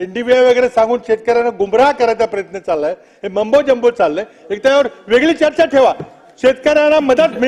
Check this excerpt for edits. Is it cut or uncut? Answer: uncut